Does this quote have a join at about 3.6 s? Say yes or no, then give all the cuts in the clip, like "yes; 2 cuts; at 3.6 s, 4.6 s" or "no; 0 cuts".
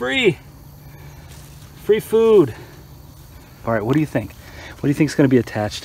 yes; 1 cut; at 3.6 s